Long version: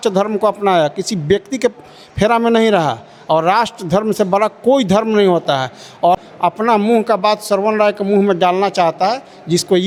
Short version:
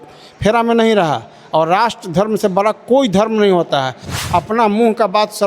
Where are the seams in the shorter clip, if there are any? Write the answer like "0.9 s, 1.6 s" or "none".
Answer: 4.2 s